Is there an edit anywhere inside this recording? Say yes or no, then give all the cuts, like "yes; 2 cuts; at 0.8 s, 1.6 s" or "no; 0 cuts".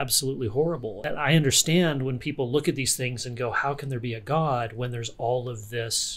yes; 1 cut; at 1.0 s